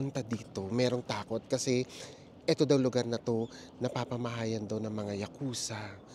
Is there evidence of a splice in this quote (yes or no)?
no